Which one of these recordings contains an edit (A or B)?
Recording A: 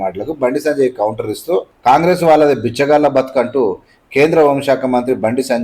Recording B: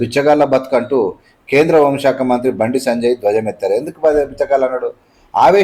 A